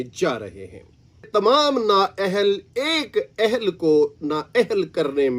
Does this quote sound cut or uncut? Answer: cut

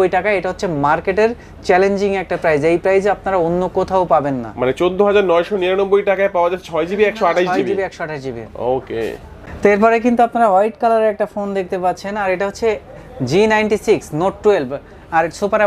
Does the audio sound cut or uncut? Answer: uncut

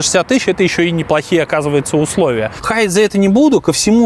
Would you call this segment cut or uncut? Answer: cut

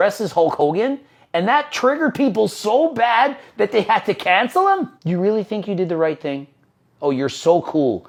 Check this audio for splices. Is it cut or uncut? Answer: uncut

